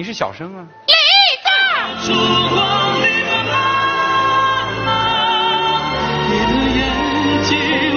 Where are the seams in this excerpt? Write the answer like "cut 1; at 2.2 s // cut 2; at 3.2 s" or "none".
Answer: cut 1; at 1.9 s